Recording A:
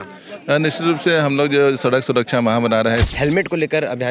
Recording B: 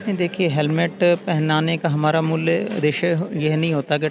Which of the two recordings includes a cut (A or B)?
A